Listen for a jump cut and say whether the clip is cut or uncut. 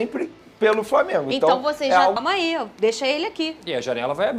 cut